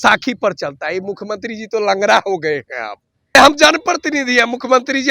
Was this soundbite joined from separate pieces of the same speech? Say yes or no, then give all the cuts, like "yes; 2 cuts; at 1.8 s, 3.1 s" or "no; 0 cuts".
yes; 1 cut; at 3.3 s